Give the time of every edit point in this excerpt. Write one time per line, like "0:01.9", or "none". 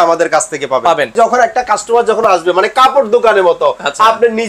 0:01.1